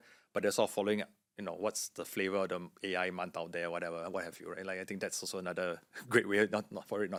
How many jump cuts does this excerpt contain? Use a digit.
0